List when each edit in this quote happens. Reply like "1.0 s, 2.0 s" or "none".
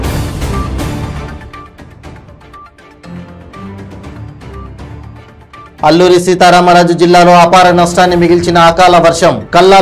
1.1 s